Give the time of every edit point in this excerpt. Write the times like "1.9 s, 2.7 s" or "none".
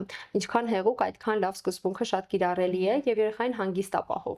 none